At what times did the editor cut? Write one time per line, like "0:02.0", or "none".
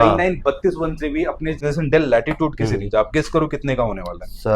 0:01.6